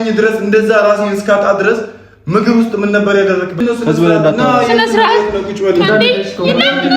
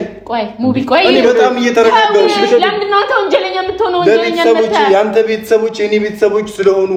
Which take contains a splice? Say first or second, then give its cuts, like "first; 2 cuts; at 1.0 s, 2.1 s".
first; 1 cut; at 3.6 s